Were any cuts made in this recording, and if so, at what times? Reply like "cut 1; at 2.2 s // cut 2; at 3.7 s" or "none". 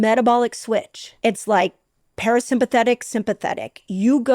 cut 1; at 1.0 s